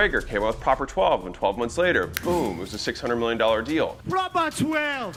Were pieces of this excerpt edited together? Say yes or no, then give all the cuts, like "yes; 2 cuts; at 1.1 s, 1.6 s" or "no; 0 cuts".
no; 0 cuts